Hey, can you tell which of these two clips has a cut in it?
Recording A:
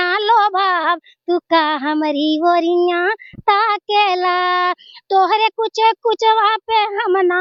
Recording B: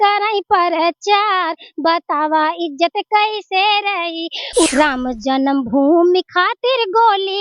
B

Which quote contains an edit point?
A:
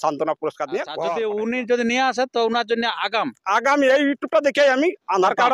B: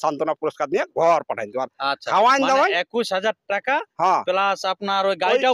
A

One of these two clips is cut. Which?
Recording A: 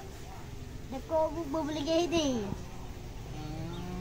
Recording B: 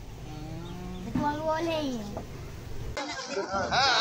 B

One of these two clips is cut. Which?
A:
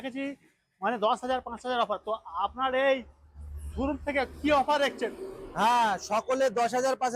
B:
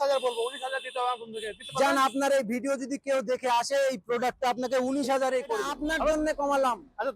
B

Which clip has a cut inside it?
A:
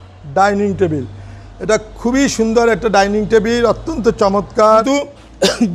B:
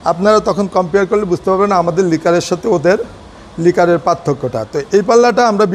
A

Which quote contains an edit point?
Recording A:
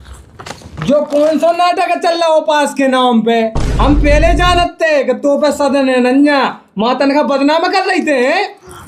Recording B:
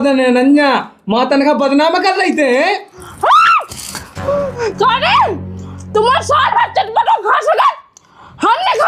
B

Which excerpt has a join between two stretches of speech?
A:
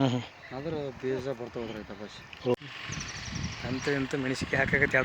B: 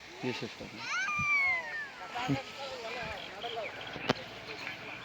A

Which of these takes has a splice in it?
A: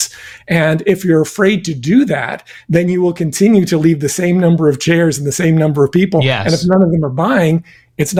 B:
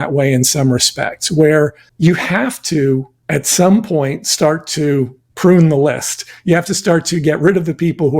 B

